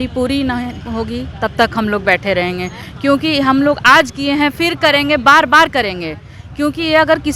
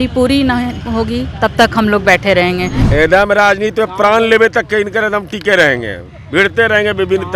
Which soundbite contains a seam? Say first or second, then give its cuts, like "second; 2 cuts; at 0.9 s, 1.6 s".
second; 1 cut; at 2.8 s